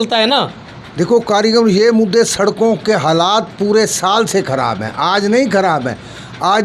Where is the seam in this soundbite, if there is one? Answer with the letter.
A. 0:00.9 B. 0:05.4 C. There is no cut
C